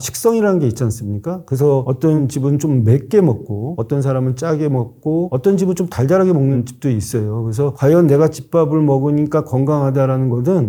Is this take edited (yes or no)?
no